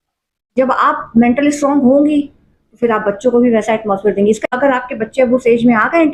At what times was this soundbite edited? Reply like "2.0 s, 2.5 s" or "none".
4.5 s